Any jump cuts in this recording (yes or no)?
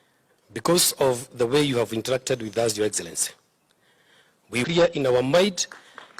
yes